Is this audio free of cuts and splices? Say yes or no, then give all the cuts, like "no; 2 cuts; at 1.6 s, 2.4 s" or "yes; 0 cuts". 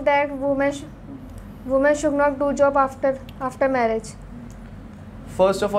yes; 0 cuts